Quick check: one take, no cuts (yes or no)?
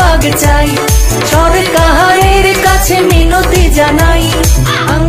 yes